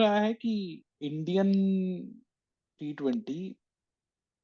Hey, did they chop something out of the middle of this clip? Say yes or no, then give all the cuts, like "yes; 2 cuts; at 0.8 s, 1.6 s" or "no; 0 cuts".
no; 0 cuts